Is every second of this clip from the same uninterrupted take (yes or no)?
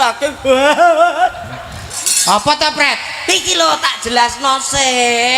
yes